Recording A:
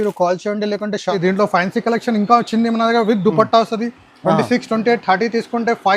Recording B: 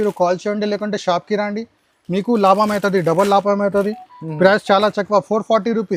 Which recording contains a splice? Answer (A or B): A